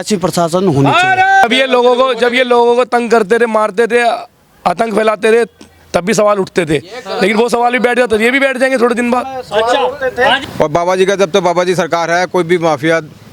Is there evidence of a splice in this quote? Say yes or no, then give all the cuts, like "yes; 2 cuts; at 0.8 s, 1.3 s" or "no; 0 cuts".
yes; 2 cuts; at 1.4 s, 10.4 s